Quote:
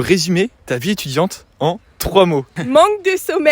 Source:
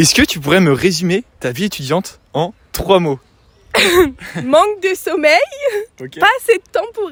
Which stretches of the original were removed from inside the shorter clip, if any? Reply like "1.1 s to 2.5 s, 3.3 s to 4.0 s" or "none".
3.3 s to 4.3 s